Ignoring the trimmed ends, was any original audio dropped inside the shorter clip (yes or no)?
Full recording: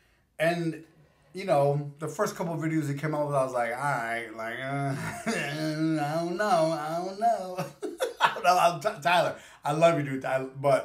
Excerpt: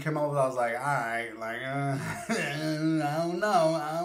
no